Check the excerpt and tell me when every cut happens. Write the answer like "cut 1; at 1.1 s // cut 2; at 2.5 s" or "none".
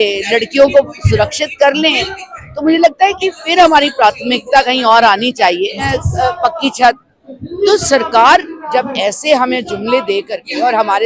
cut 1; at 5.8 s